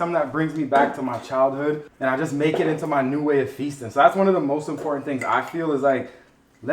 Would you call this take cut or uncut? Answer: cut